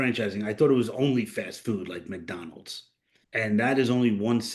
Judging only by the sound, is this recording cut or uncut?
cut